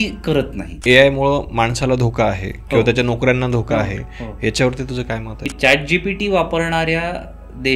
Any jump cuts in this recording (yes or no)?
yes